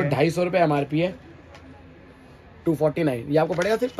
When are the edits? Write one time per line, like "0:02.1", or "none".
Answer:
none